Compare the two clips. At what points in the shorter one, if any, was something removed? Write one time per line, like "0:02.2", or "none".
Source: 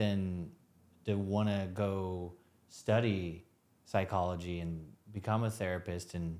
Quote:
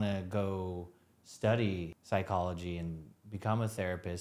0:01.9